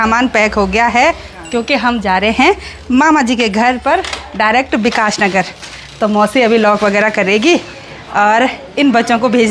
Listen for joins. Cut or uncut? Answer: uncut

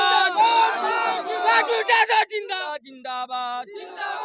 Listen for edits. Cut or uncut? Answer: cut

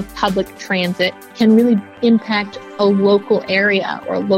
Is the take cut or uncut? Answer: cut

